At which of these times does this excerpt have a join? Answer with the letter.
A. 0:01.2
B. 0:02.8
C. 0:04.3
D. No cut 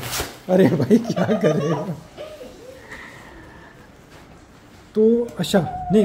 D